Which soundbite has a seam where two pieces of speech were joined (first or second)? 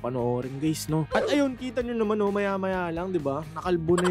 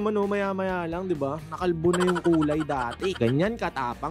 first